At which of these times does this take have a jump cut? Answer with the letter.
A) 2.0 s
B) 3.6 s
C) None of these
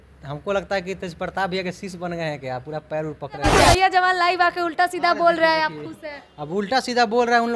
B